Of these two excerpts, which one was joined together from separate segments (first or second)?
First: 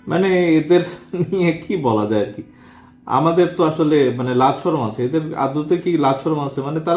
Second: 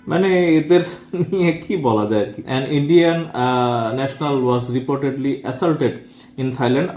second